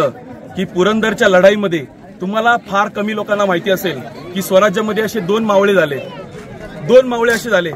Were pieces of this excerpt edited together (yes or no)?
no